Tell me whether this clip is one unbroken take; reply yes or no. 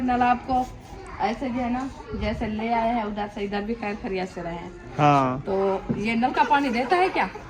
yes